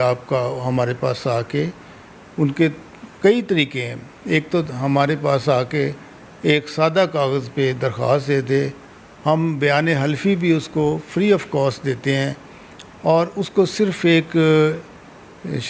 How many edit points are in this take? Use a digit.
0